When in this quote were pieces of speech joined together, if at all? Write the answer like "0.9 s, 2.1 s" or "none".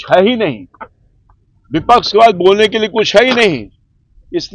none